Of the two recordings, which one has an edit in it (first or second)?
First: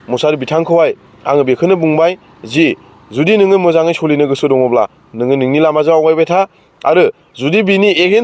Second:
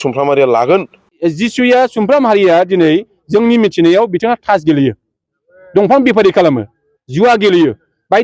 second